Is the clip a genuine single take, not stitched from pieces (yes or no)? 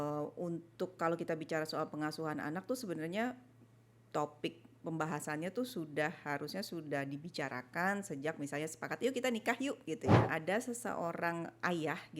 no